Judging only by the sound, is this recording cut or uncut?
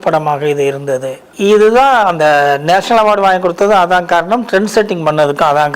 cut